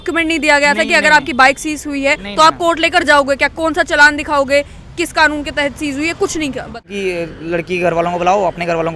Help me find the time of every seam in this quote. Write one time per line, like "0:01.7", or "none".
0:06.9